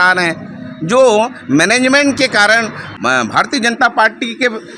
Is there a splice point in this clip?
yes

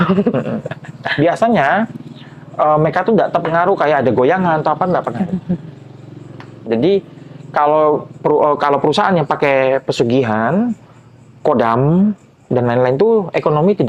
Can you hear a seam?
no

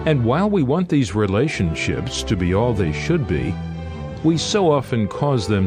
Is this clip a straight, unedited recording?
yes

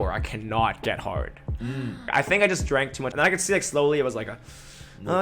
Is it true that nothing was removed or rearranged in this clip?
no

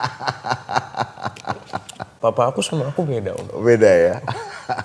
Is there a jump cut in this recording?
no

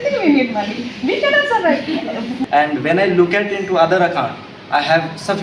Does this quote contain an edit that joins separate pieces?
yes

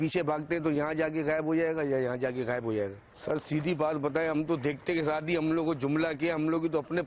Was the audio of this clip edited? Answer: yes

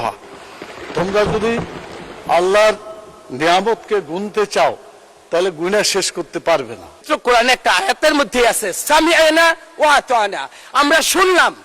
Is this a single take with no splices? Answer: no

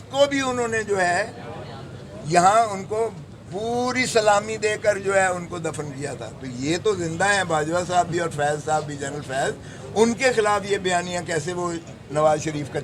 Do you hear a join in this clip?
no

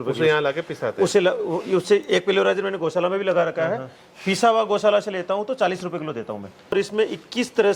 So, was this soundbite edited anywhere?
yes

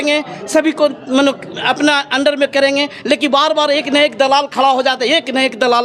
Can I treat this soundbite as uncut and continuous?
yes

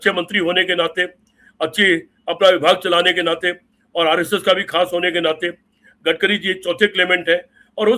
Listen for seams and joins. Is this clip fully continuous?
yes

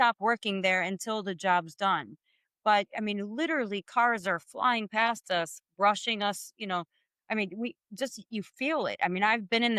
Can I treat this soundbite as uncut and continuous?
yes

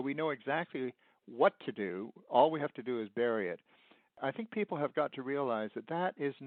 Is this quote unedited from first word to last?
yes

